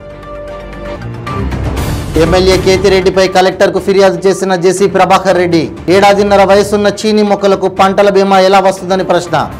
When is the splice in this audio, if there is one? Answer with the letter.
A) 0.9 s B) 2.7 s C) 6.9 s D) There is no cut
A